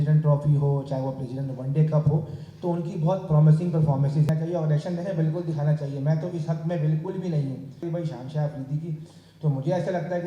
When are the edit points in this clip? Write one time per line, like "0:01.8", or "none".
0:04.3
0:07.8